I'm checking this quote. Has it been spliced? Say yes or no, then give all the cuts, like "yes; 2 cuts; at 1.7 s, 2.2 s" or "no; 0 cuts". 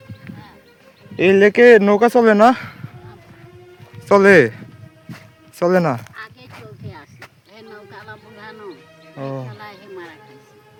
no; 0 cuts